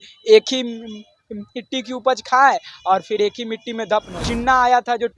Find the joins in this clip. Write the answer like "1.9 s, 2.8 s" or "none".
4.2 s